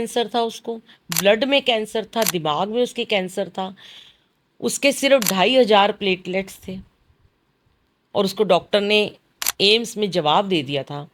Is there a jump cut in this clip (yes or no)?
no